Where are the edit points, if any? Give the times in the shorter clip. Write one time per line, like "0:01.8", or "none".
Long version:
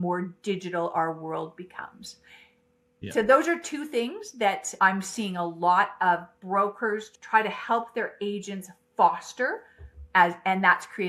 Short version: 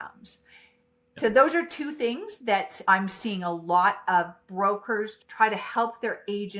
0:01.2